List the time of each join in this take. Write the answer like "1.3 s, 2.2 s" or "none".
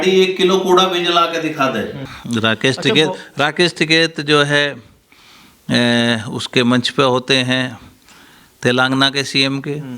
2.1 s